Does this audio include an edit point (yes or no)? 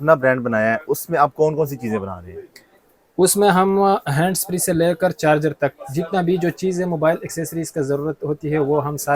no